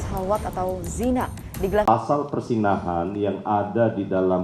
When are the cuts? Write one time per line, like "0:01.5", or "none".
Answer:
0:01.8

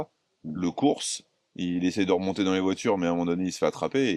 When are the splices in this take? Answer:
none

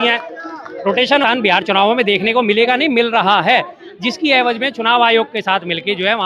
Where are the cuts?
0:01.2

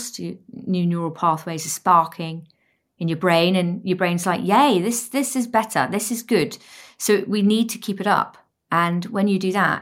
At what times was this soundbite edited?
none

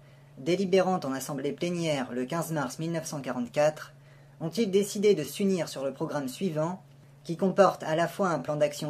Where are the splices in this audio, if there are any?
0:01.9

